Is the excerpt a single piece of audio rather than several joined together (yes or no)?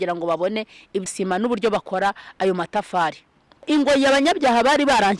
no